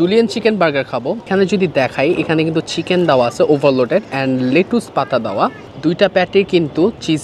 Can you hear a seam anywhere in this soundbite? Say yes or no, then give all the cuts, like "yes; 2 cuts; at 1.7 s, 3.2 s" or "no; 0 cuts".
yes; 2 cuts; at 1.3 s, 5.7 s